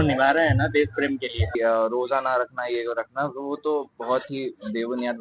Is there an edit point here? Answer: yes; 1 cut; at 1.5 s

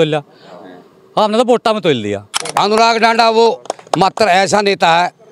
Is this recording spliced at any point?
yes; 1 cut; at 2.4 s

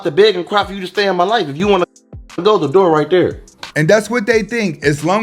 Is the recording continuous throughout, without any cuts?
yes; 0 cuts

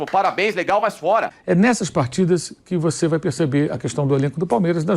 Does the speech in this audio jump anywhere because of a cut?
yes; 1 cut; at 1.3 s

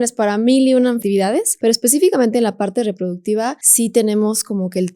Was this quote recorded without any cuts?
no; 2 cuts; at 1.1 s, 3.6 s

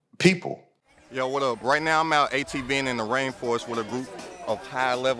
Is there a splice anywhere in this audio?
yes; 1 cut; at 1.0 s

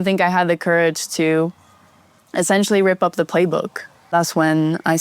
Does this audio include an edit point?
yes; 1 cut; at 4.1 s

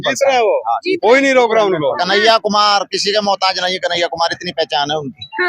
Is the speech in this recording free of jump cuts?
yes; 0 cuts

